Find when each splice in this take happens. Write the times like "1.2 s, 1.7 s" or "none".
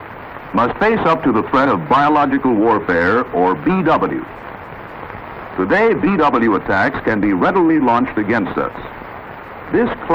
7.7 s